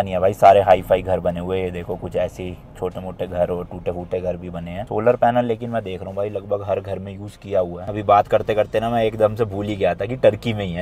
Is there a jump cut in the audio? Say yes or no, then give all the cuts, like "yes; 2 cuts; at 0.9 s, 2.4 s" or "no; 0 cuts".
no; 0 cuts